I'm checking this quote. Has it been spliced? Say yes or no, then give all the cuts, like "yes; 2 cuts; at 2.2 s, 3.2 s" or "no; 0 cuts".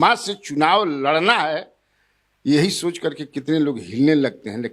no; 0 cuts